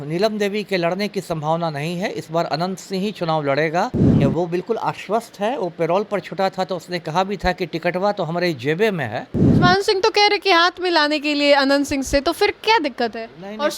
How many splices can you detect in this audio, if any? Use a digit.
2